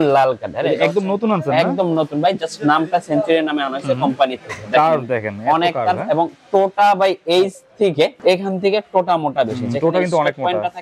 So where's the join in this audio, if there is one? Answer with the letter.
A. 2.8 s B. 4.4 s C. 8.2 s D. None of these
C